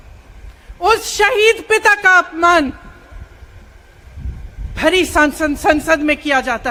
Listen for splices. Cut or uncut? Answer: uncut